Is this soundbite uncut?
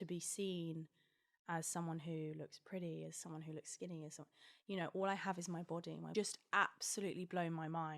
no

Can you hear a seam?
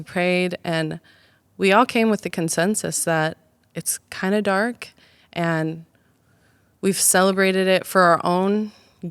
no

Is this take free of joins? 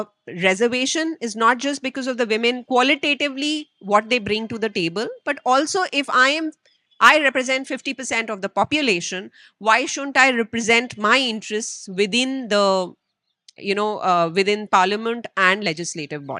yes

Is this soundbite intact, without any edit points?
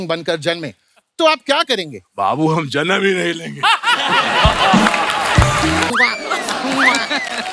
no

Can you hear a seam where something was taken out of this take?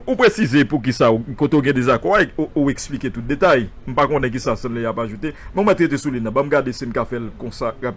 no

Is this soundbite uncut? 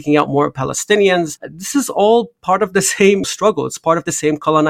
no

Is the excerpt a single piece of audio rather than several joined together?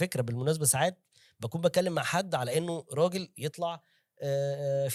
yes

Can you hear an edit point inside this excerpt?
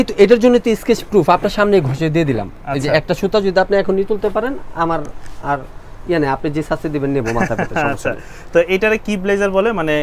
no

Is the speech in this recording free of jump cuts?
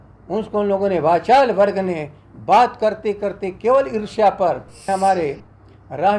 no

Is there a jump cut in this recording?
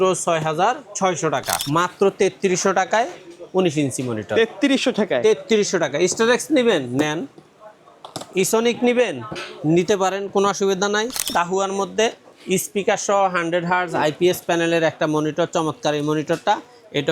yes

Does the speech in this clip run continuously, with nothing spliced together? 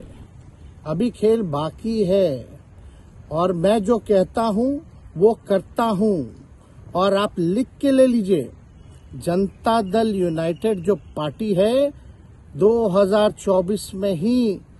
yes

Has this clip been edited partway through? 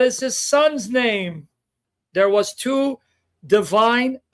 yes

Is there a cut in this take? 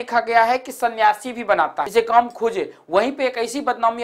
yes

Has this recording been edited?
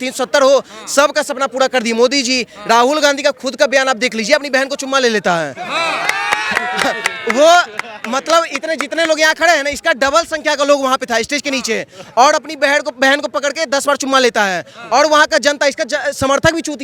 no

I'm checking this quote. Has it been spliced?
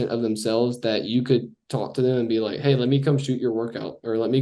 no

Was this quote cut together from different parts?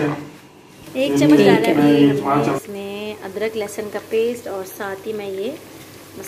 yes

